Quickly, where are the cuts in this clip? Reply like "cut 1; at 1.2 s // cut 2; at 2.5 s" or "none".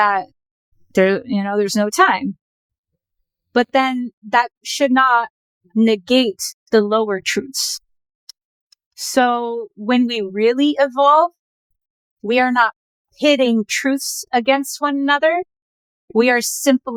none